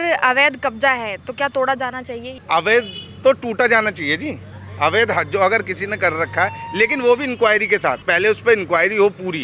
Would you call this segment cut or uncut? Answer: cut